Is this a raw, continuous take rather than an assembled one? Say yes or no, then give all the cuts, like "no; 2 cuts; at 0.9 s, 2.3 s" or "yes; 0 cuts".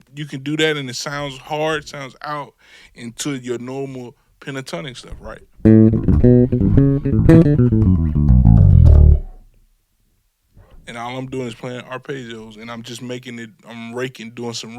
yes; 0 cuts